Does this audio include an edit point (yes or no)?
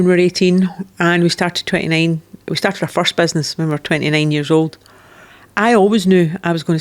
no